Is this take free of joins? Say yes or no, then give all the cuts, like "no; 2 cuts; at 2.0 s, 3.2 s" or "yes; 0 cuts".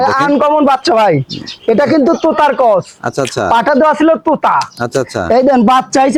yes; 0 cuts